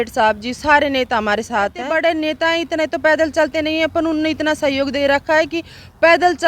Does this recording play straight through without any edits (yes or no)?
no